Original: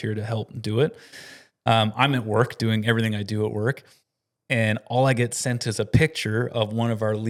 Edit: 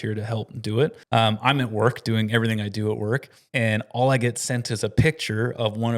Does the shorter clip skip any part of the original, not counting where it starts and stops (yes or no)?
yes